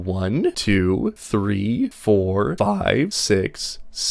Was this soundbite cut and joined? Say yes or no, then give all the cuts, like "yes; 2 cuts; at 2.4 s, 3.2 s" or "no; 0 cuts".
no; 0 cuts